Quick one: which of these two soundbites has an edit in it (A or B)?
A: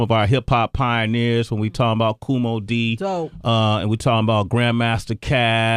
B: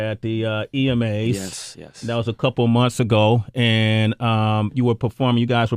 B